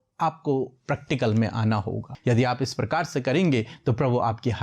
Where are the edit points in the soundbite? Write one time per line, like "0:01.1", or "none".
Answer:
0:02.0